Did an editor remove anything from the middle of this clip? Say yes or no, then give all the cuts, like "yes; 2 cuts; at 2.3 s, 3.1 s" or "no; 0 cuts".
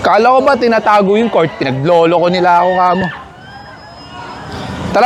no; 0 cuts